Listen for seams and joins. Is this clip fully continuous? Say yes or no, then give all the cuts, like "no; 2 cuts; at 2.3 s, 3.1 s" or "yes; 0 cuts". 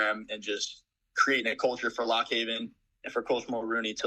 yes; 0 cuts